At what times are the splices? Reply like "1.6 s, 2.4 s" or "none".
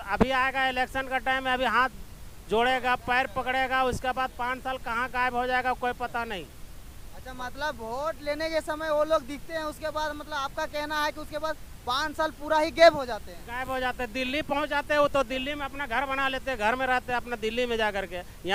none